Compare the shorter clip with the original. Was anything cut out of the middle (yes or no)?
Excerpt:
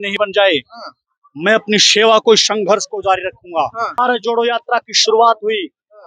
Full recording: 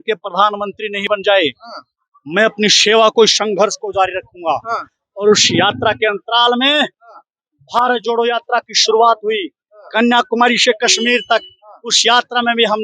yes